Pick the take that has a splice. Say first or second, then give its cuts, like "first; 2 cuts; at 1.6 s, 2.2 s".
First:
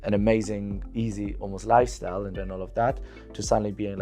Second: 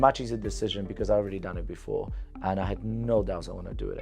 first; 1 cut; at 2.4 s